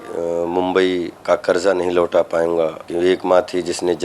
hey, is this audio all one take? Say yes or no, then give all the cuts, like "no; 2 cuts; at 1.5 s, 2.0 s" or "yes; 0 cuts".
no; 2 cuts; at 1.2 s, 2.8 s